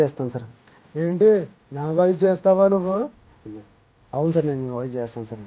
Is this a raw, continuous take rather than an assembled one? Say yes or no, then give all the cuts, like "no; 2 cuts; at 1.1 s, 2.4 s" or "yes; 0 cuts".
yes; 0 cuts